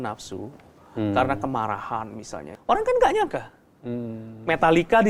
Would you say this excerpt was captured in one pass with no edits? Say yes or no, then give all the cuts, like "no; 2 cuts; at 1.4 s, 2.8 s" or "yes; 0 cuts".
no; 1 cut; at 2.4 s